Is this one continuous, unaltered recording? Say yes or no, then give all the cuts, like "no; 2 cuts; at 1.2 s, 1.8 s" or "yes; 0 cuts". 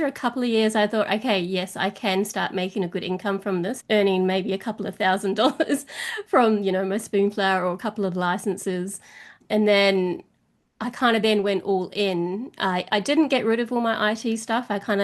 no; 2 cuts; at 3.8 s, 9.4 s